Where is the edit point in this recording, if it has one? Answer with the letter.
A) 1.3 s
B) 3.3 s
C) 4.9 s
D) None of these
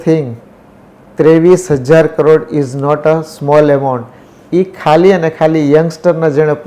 D